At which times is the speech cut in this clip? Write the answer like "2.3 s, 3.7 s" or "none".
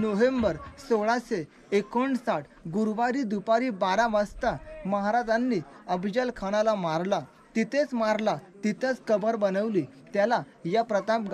none